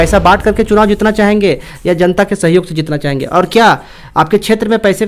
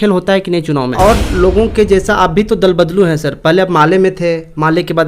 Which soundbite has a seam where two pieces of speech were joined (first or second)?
second